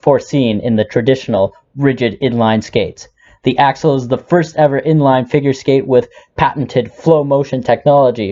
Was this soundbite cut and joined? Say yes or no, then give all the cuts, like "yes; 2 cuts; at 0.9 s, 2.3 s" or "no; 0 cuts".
no; 0 cuts